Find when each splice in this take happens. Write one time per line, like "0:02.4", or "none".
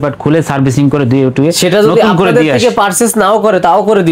none